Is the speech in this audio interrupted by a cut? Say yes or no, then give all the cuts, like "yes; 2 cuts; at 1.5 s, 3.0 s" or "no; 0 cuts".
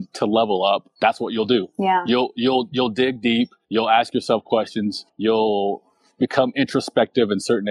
yes; 3 cuts; at 0.9 s, 3.6 s, 5.0 s